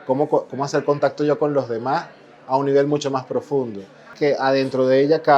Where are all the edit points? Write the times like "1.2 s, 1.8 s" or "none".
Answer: 4.1 s